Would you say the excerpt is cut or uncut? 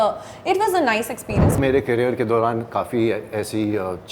cut